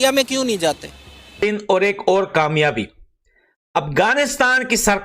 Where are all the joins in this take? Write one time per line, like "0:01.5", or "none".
0:01.4